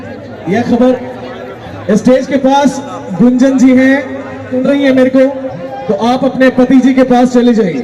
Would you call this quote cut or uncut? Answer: cut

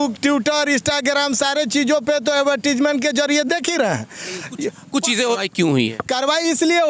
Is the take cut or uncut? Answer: cut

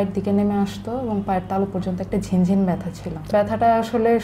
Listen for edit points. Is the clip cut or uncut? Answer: cut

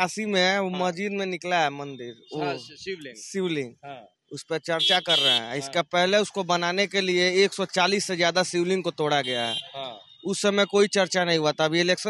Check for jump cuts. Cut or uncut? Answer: uncut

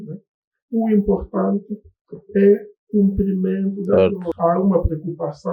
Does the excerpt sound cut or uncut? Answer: cut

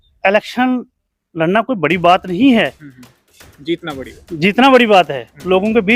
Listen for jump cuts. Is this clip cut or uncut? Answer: uncut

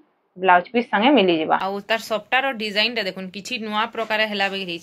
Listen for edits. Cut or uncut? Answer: cut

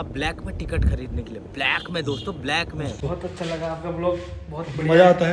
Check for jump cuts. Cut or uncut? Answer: cut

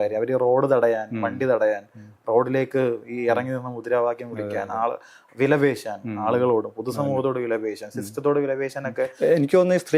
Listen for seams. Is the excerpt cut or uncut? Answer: uncut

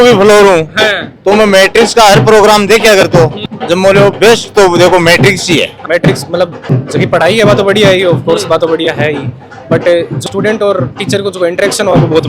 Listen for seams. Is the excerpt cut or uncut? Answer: cut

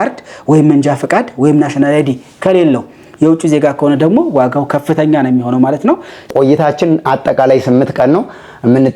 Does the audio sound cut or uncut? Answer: cut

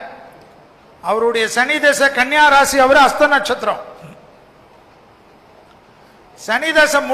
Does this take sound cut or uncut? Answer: uncut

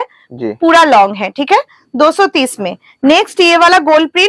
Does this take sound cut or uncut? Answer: uncut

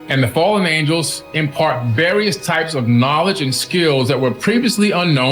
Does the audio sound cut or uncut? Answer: uncut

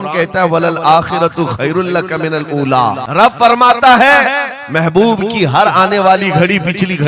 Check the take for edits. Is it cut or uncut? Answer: cut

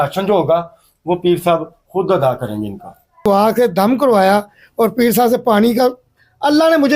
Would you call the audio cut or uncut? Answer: cut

